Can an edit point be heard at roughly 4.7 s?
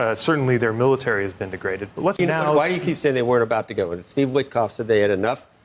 no; 1 cut; at 2.2 s

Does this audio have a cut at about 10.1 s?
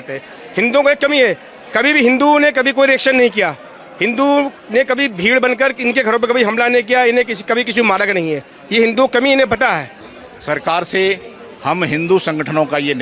yes; 1 cut; at 10.1 s

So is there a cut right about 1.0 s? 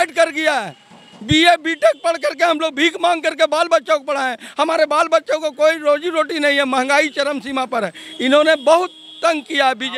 no; 0 cuts

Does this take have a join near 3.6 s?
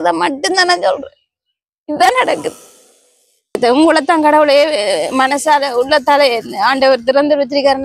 yes; 1 cut; at 3.6 s

